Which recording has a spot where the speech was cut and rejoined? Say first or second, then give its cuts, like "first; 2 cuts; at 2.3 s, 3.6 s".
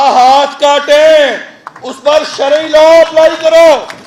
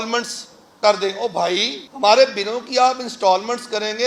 second; 1 cut; at 1.8 s